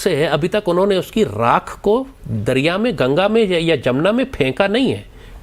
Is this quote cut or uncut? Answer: uncut